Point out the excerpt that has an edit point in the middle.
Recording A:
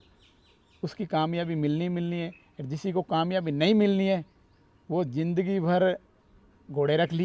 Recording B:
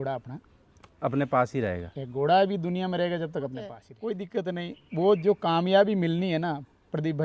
B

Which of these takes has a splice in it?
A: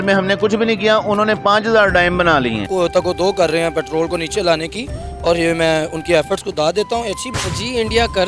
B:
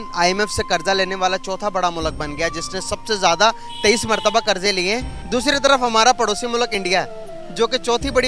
A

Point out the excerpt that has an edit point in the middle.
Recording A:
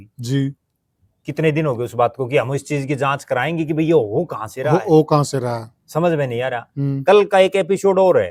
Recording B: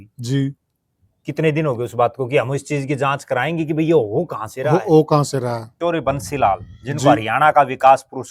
B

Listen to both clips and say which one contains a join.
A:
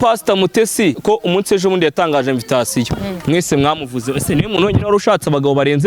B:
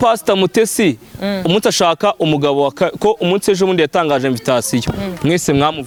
A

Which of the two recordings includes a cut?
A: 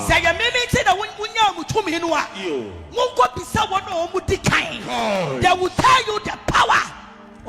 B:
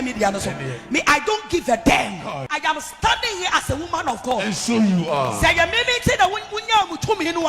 B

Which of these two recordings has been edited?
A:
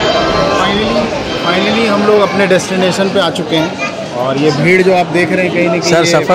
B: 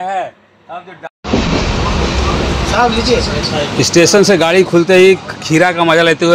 B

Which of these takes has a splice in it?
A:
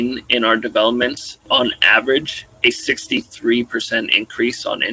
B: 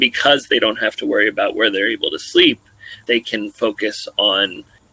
A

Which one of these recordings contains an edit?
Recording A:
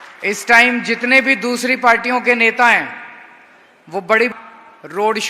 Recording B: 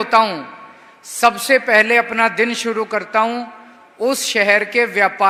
A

